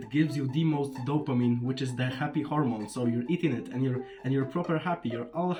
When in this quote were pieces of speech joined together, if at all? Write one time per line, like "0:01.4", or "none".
none